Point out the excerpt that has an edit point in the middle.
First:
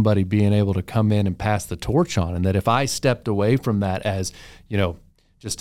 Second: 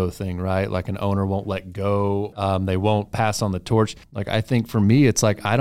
second; 2 cuts; at 2.4 s, 4.1 s

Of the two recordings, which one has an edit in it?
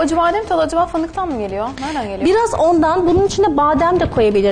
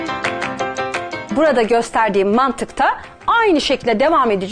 second; 1 cut; at 1.3 s

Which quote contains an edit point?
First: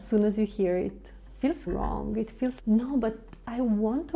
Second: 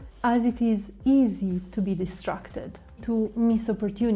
second; 1 cut; at 3.0 s

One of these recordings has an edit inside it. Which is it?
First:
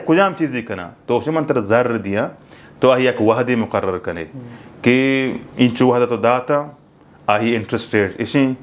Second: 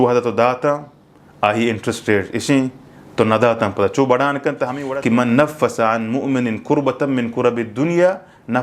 second; 1 cut; at 4.8 s

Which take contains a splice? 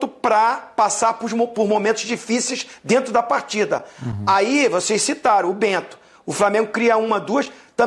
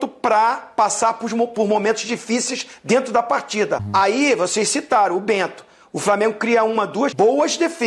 second; 2 cuts; at 3.8 s, 7.1 s

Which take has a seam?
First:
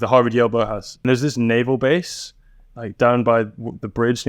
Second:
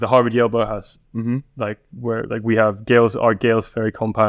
first; 1 cut; at 0.9 s

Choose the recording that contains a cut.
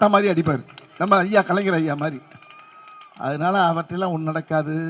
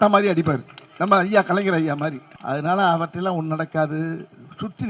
second; 1 cut; at 2.3 s

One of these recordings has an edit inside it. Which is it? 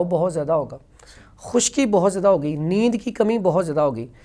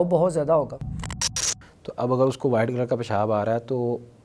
second; 1 cut; at 1.3 s

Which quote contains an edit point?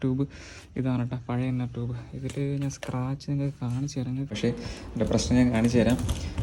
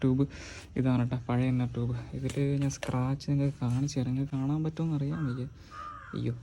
first; 1 cut; at 4.3 s

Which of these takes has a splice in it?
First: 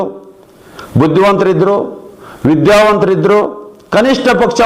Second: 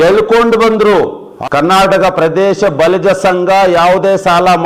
second; 1 cut; at 1.2 s

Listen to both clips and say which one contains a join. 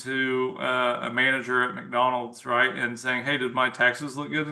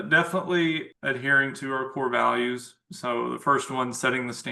second; 1 cut; at 0.9 s

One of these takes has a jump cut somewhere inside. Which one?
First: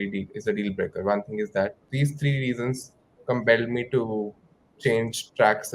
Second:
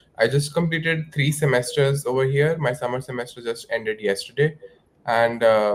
first; 1 cut; at 1.8 s

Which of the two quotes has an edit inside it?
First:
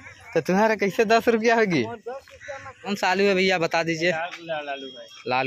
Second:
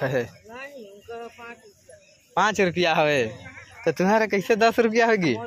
first; 1 cut; at 2.9 s

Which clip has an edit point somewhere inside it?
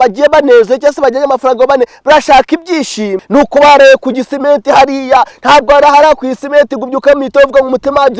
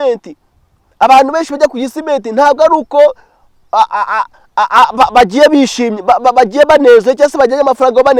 first; 1 cut; at 3.2 s

